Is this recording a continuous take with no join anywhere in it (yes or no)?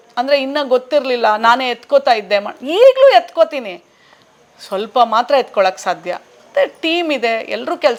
yes